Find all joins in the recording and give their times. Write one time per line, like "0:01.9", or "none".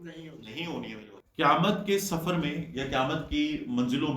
0:01.2